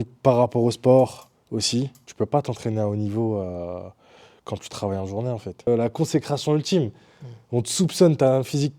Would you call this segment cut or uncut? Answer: cut